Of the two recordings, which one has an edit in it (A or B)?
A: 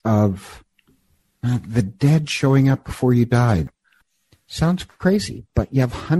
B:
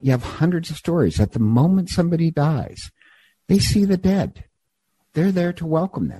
A